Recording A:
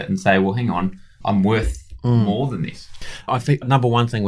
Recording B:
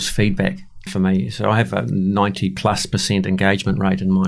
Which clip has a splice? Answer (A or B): A